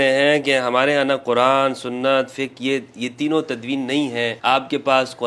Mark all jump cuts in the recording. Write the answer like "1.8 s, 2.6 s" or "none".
4.4 s